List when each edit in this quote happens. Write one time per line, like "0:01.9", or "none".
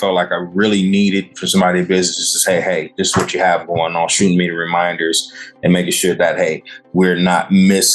none